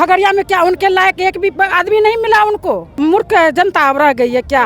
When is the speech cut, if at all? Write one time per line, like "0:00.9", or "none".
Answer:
0:03.0